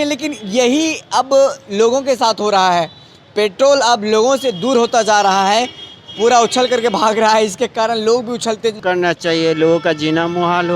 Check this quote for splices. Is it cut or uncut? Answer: cut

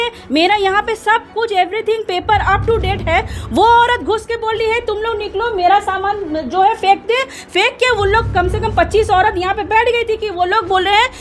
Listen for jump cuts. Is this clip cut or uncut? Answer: uncut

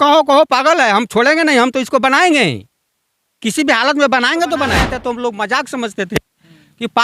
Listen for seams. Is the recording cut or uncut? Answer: cut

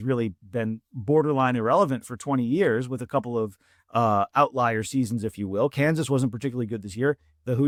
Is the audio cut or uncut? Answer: uncut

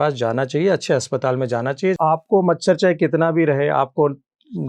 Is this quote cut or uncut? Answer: cut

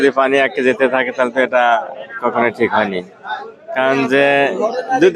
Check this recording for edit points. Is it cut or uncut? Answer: uncut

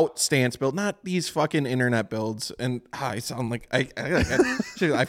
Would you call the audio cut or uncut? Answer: uncut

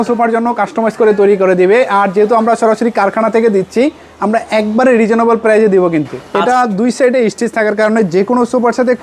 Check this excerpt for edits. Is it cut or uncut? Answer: cut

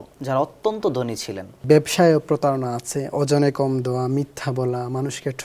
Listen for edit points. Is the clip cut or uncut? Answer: cut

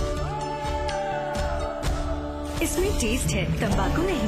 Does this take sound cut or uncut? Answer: uncut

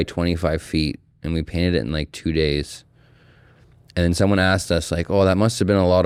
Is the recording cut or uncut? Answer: uncut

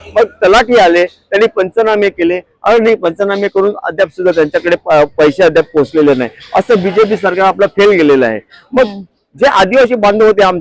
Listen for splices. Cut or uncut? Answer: uncut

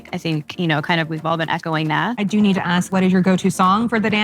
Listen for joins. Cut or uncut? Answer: cut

